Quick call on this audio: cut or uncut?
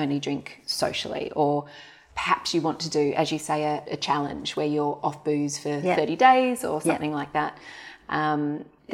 uncut